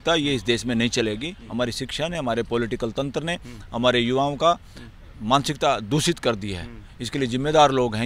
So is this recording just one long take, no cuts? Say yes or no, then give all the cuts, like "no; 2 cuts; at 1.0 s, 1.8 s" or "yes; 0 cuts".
no; 1 cut; at 1.4 s